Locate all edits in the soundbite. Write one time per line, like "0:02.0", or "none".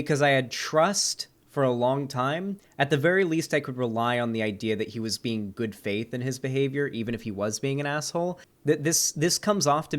0:02.6
0:08.5